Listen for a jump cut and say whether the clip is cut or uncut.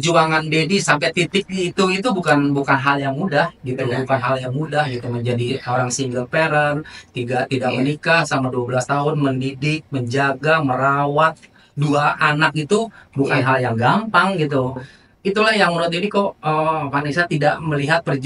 uncut